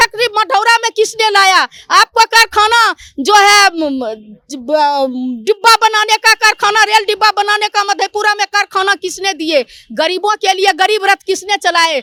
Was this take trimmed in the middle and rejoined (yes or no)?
no